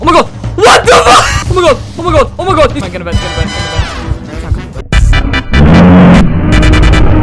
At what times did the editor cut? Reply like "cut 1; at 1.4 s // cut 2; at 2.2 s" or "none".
cut 1; at 2.8 s // cut 2; at 6.2 s